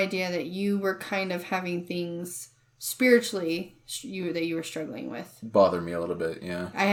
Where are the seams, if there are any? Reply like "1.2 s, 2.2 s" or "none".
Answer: none